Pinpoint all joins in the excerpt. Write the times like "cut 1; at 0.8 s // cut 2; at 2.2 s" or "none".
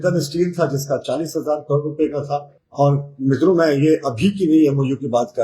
cut 1; at 2.6 s